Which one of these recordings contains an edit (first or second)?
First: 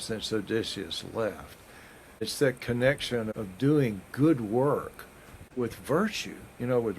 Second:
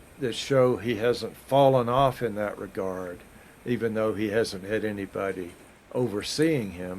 first